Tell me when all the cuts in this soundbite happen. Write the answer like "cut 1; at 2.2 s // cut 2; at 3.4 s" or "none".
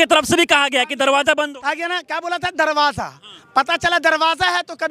none